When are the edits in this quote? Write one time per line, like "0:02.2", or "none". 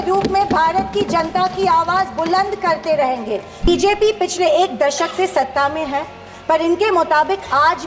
0:03.7